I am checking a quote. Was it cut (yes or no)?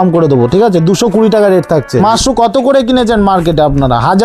yes